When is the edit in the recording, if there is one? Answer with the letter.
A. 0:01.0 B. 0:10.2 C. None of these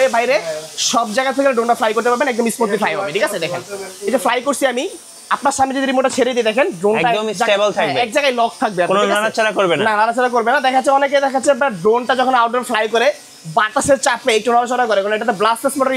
C